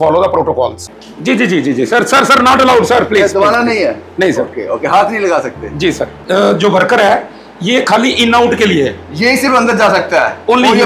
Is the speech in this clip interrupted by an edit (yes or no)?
yes